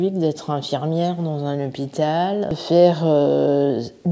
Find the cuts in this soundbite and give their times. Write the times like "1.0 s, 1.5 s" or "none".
2.6 s